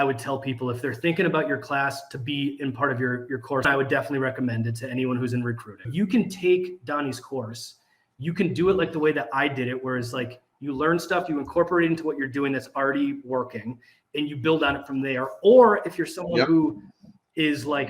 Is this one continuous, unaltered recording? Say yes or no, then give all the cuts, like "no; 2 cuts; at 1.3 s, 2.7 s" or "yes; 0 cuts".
no; 2 cuts; at 3.7 s, 5.9 s